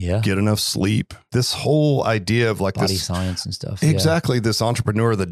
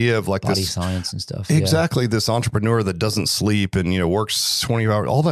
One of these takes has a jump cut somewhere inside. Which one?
first; 1 cut; at 1.3 s

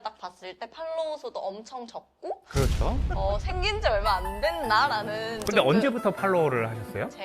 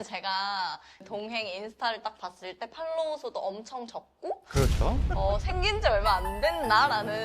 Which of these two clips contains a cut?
second; 1 cut; at 1.0 s

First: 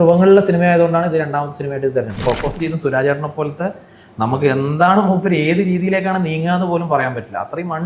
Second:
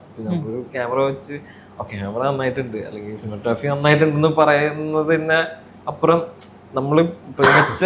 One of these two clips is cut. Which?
first; 1 cut; at 2.1 s

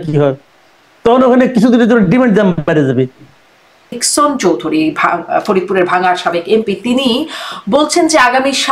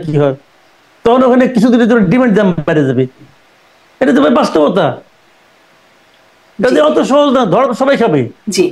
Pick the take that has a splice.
first; 1 cut; at 4.0 s

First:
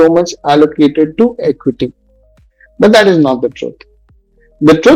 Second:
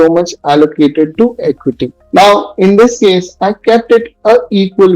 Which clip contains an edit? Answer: second; 1 cut; at 1.9 s

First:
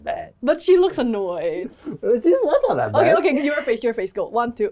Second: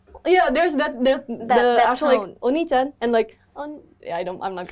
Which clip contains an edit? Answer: first; 1 cut; at 1.7 s

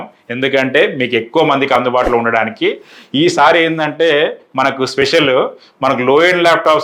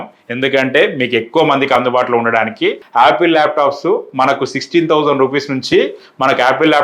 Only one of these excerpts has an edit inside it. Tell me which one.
second; 1 cut; at 2.8 s

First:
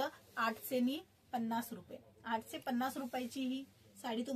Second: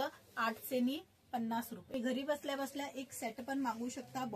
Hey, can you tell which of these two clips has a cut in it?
second; 1 cut; at 1.9 s

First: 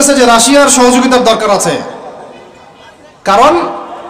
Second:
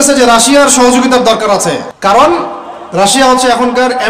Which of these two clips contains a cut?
second; 1 cut; at 1.9 s

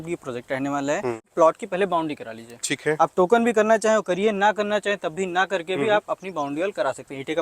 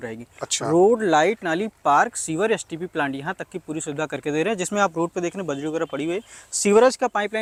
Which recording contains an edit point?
first; 1 cut; at 1.3 s

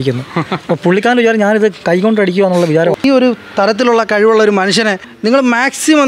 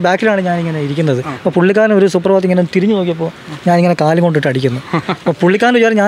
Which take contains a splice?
first; 1 cut; at 3.0 s

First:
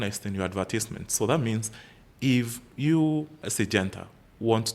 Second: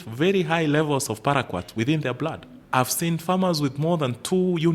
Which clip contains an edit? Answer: first; 1 cut; at 3.4 s

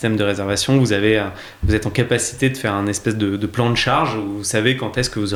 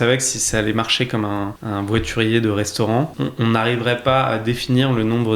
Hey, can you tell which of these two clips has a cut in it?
second; 2 cuts; at 1.6 s, 3.1 s

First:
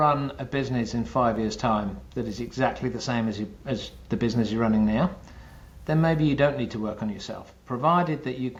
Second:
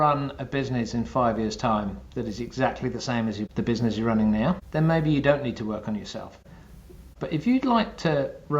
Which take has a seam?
second; 3 cuts; at 3.5 s, 4.7 s, 6.6 s

